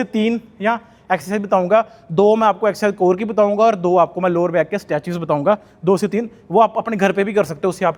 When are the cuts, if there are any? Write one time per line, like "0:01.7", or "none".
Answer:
none